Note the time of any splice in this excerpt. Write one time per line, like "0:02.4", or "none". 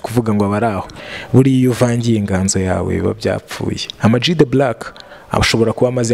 0:00.9